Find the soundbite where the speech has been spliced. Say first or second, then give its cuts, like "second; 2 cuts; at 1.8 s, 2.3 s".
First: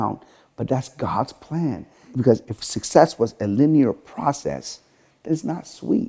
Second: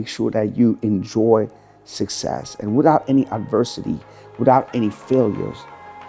first; 1 cut; at 2.3 s